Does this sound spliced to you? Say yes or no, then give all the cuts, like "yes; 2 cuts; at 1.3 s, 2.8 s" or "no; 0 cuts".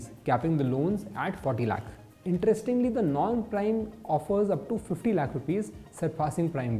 no; 0 cuts